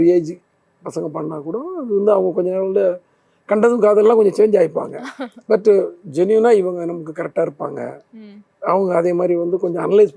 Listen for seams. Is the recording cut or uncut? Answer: uncut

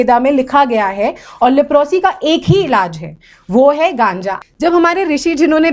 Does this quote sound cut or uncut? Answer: cut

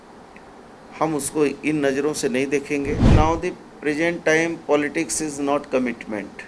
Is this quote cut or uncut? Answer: cut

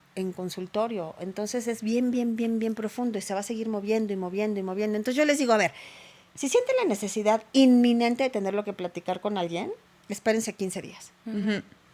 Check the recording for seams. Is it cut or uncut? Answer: uncut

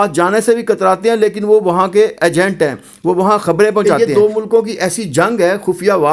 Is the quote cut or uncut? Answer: uncut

